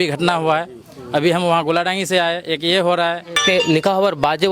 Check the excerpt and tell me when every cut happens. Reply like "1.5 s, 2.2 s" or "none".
3.3 s